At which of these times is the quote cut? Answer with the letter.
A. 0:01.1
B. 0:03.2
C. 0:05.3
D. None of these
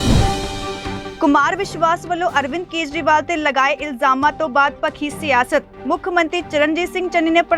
A